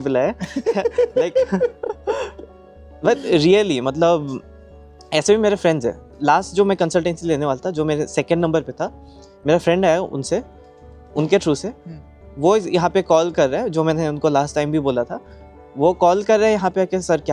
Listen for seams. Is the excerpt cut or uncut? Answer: uncut